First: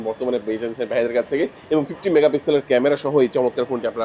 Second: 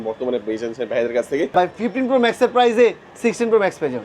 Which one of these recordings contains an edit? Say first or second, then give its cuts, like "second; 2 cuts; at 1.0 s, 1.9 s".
second; 1 cut; at 1.5 s